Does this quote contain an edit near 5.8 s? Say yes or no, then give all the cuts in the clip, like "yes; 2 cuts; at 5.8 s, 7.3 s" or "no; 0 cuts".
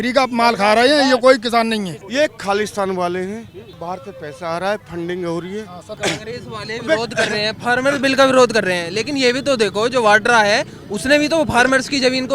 yes; 2 cuts; at 2.0 s, 5.8 s